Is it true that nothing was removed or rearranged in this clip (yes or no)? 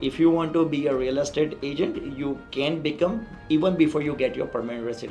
yes